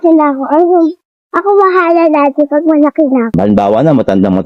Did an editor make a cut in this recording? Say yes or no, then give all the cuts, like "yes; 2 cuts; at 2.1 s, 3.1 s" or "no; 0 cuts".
yes; 1 cut; at 3.4 s